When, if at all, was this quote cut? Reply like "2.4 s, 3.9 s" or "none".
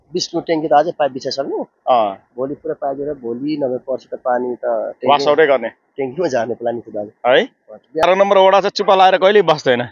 8.0 s

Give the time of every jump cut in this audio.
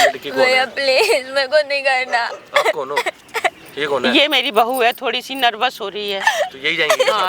none

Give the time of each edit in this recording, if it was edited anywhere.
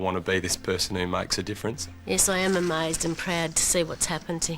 1.8 s

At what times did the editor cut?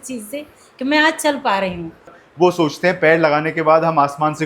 2.2 s

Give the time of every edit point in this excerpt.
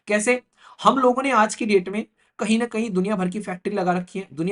none

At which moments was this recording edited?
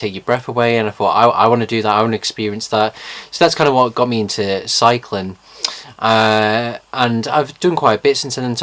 2.6 s

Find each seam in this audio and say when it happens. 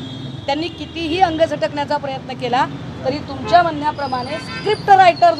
none

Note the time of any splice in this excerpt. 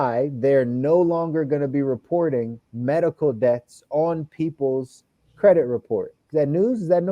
6.2 s

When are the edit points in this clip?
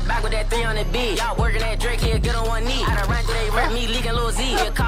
none

